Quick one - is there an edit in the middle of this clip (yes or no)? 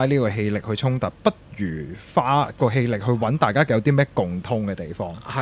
no